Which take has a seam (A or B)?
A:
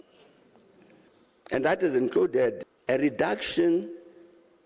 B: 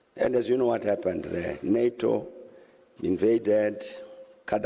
A